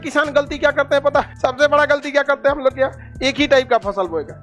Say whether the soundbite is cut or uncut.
uncut